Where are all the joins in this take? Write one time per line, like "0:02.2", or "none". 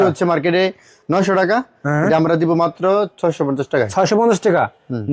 none